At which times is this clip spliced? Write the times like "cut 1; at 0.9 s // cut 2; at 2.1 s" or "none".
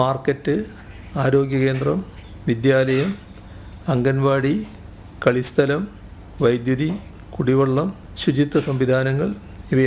cut 1; at 8.0 s

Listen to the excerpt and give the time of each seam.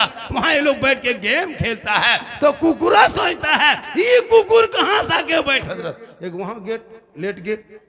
cut 1; at 5.7 s

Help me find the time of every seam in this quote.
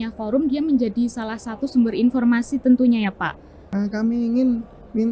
cut 1; at 3.6 s

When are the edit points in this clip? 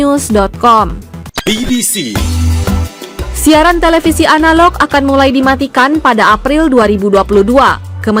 none

